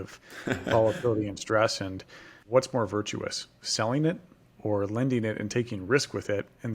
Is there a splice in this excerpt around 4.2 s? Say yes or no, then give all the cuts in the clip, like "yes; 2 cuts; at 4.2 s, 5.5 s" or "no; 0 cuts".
no; 1 cut; at 2.5 s